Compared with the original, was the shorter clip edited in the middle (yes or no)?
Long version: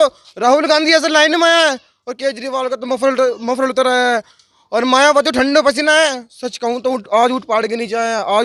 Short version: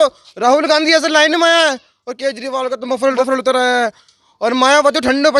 yes